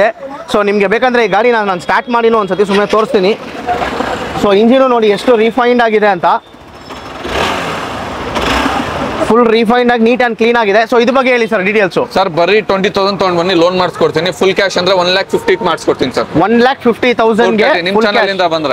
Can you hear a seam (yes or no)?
no